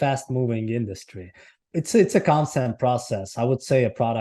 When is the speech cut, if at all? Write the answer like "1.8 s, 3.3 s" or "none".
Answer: 1.6 s